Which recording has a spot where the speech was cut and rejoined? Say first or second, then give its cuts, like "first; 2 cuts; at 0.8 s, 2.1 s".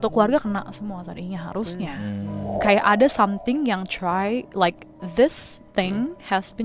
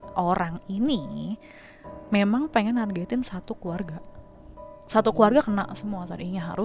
first; 1 cut; at 2.5 s